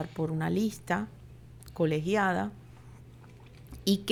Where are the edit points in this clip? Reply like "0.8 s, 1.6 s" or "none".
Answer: none